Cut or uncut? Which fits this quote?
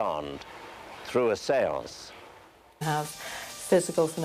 uncut